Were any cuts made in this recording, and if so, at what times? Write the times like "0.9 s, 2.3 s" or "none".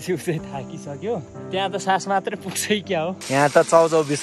1.3 s, 3.2 s